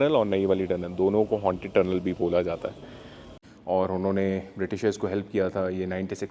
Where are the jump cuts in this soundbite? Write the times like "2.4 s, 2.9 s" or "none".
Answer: 3.3 s